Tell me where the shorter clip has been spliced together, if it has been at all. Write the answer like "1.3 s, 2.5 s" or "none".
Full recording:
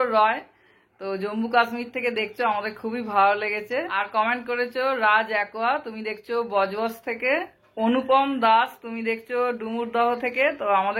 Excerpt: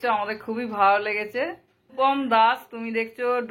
1.8 s